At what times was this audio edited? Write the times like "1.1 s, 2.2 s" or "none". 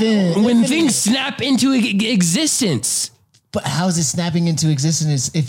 none

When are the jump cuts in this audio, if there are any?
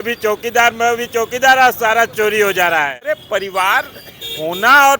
3.2 s

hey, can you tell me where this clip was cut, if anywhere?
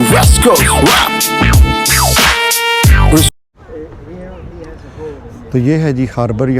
3.3 s

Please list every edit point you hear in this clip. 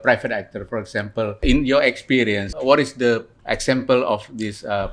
1.4 s, 2.5 s, 3.3 s

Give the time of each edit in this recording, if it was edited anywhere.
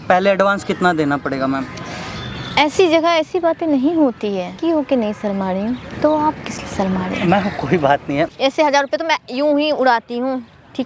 4.5 s, 8.3 s

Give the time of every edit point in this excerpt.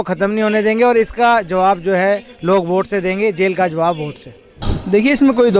4.7 s

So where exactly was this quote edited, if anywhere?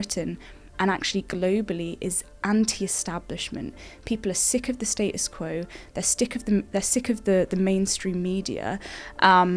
none

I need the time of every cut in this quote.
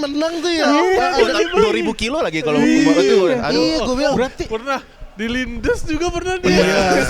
none

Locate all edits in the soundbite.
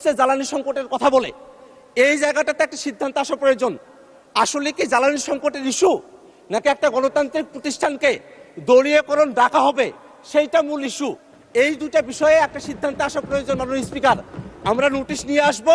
none

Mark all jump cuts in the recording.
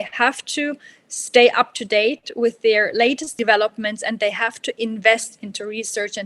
3.3 s

